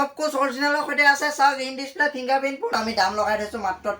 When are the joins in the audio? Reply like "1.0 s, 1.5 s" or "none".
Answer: 2.8 s